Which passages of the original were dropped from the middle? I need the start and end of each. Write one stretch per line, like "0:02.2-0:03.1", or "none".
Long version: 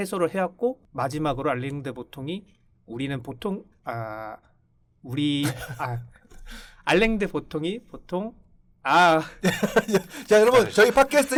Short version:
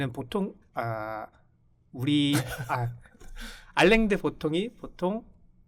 none